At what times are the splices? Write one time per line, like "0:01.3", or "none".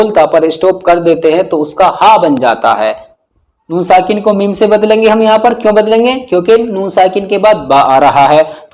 none

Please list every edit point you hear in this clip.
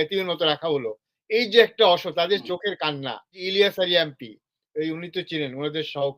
0:03.4

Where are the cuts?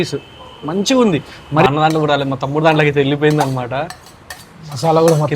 0:01.7

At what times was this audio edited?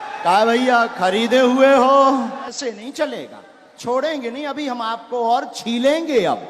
0:02.5

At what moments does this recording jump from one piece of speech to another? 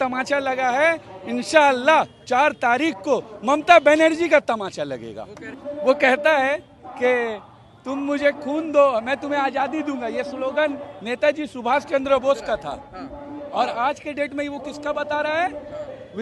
0:05.6

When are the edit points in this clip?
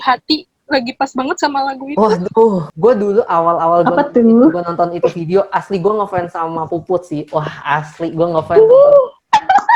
0:02.7

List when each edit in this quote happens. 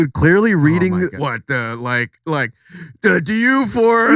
0:01.2

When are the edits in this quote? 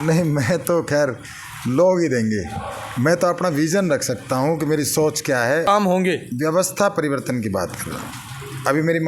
0:05.7

